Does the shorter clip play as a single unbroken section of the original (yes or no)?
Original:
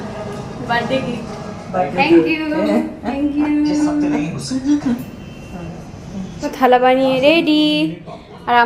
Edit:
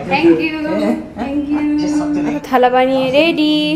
no